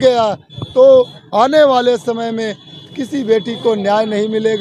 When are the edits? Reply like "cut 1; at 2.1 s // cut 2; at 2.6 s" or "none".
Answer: none